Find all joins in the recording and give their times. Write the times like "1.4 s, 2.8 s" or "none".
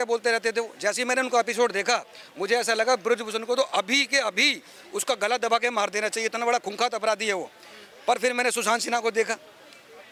none